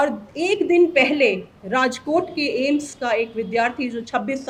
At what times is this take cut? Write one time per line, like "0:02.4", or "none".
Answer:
none